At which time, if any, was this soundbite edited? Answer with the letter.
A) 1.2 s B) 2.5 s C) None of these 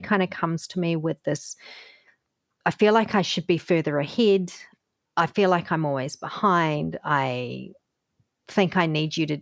B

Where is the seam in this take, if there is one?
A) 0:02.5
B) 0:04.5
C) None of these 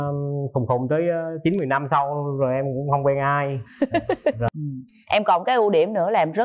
B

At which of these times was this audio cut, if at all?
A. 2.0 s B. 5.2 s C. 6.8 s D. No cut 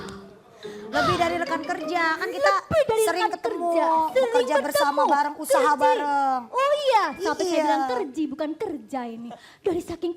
C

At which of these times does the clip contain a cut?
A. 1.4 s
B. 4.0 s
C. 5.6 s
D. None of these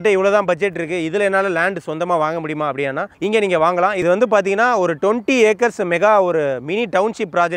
B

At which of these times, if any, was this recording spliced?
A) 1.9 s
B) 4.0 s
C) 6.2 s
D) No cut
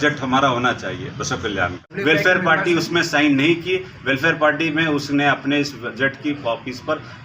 A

